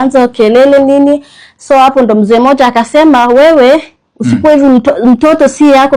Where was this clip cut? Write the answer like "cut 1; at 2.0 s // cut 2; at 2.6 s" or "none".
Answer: none